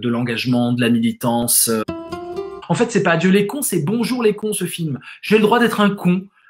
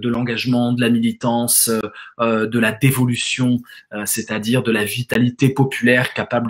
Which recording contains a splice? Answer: first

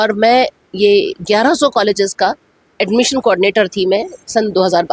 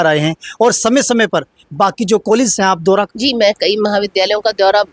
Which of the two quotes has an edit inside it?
second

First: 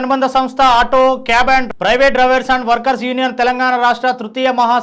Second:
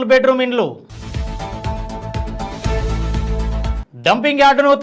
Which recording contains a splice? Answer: second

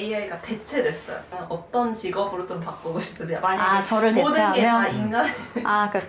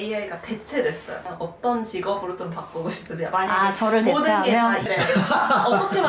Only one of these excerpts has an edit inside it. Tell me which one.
second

